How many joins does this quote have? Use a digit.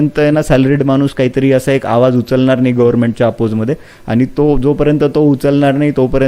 0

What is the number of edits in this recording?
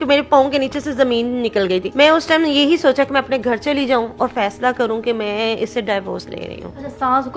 0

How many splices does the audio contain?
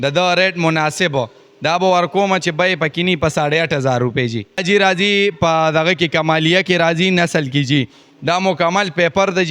1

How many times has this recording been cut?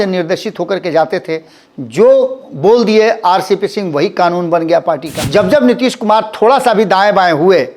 1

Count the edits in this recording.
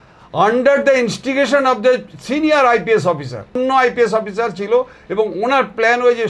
1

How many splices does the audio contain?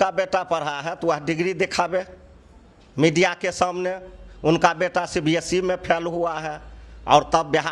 0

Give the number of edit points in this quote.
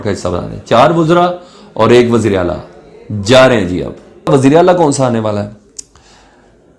1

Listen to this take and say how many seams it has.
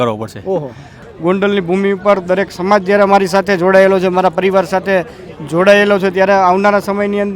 1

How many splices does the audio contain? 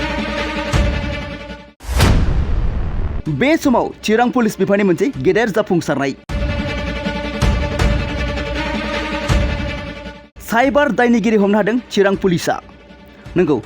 1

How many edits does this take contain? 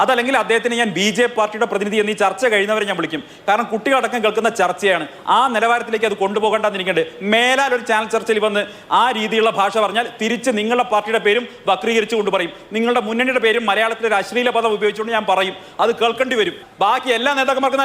1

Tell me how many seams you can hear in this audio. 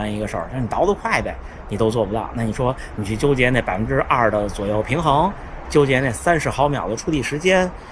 0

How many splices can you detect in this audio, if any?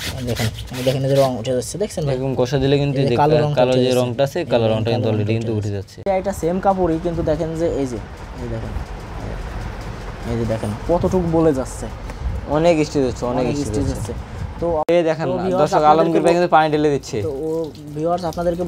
2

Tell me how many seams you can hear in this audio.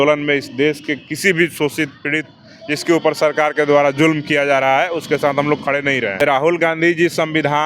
1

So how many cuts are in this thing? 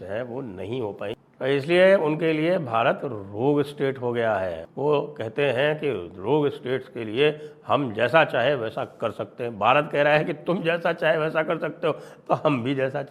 1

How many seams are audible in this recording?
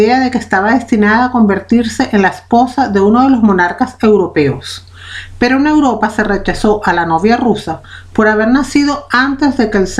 1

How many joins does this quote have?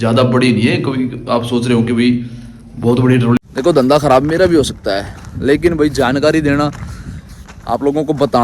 1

